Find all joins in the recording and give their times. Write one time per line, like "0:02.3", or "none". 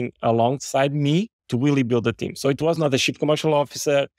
0:01.4